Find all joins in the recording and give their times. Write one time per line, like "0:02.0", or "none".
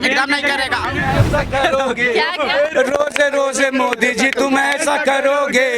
0:00.9